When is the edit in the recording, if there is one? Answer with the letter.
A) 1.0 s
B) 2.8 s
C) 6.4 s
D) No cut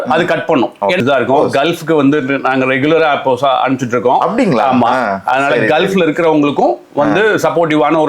A